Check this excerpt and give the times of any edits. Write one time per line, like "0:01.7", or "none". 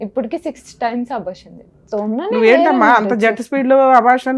0:01.8